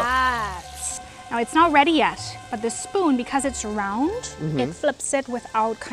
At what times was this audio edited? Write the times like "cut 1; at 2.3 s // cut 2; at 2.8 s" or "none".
cut 1; at 1.0 s